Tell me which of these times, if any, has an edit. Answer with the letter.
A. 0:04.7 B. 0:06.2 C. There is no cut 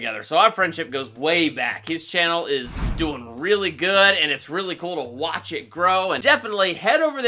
B